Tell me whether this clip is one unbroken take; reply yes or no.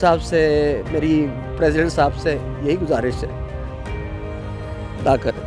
yes